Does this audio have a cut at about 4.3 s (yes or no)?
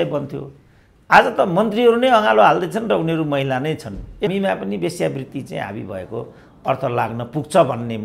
yes